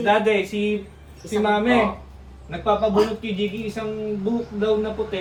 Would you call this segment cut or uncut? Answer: uncut